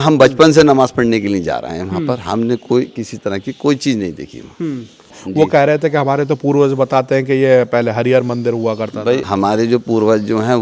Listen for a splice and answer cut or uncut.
cut